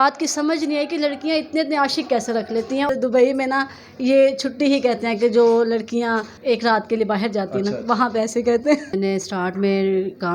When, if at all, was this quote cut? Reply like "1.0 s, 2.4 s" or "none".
2.9 s, 6.3 s, 8.9 s

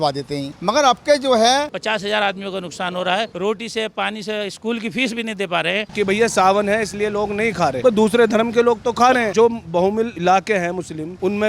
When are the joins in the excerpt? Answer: 1.7 s, 5.9 s

